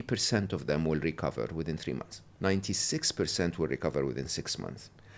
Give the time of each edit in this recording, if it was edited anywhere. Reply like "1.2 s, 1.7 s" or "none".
2.3 s

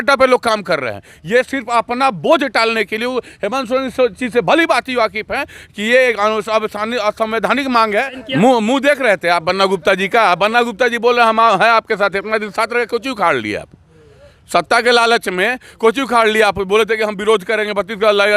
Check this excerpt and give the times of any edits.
8.2 s

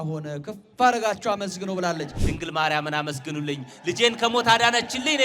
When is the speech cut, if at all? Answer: 2.2 s

